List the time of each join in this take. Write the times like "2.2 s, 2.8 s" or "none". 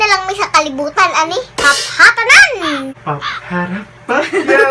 2.8 s